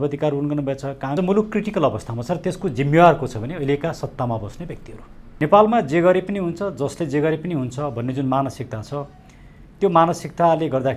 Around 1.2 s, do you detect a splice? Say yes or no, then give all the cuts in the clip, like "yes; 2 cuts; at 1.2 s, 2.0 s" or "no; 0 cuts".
yes; 2 cuts; at 1.2 s, 5.2 s